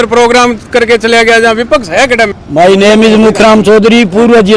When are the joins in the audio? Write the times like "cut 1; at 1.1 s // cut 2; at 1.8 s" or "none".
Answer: cut 1; at 2.3 s